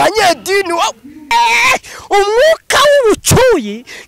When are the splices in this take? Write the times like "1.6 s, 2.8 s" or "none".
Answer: 1.3 s

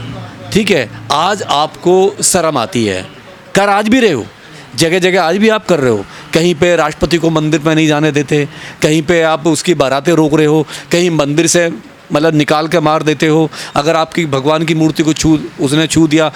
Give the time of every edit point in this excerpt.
none

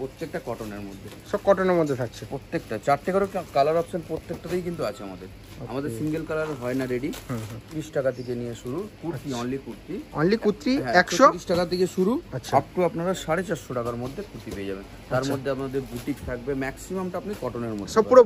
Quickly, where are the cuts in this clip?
7.6 s

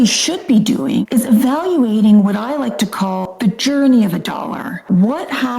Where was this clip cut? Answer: 1.0 s, 3.3 s, 4.7 s

